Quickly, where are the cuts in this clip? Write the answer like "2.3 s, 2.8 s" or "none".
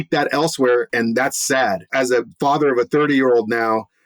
0.9 s, 1.9 s